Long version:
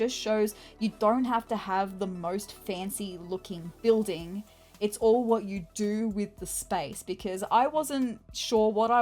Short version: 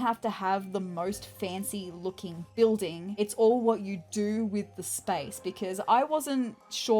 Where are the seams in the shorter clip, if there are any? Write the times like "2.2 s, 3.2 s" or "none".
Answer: 3.0 s